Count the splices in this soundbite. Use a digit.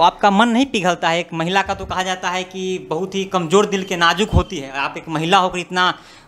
0